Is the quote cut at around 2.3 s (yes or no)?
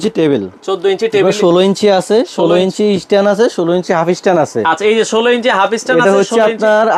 no